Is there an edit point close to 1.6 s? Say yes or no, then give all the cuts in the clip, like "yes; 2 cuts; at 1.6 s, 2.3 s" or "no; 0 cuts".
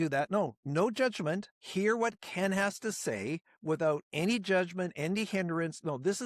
yes; 1 cut; at 1.6 s